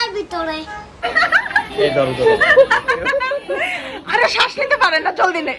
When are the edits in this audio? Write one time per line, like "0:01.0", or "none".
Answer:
0:01.0